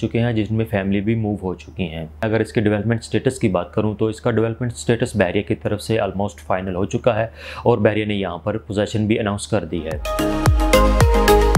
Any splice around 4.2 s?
no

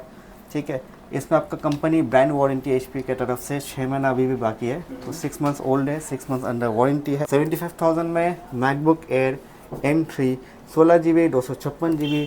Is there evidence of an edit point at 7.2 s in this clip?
yes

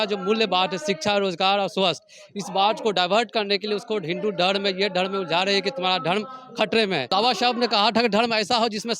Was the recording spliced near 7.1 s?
yes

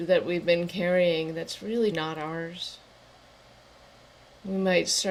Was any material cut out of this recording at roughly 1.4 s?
no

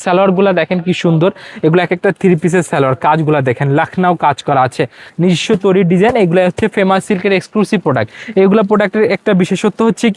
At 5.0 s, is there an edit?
yes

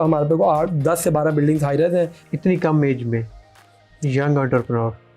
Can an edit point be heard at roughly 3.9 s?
no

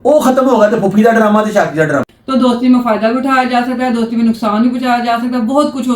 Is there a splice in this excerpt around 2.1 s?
yes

